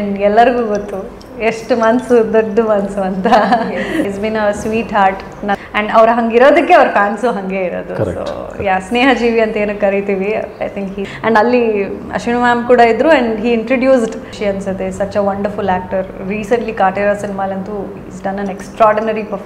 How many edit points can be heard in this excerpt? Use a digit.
4